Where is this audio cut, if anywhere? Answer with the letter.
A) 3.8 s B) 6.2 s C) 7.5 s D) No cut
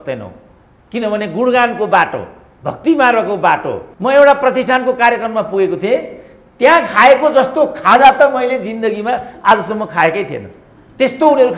A